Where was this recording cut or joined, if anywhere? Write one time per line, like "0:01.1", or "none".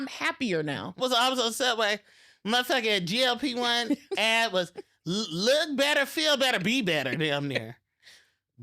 0:01.0